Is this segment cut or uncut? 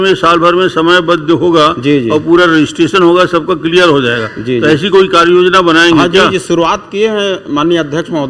uncut